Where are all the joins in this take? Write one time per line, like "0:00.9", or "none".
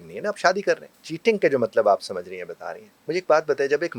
0:00.9